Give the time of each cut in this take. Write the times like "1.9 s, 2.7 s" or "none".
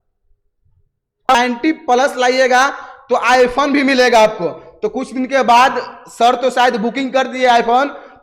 1.3 s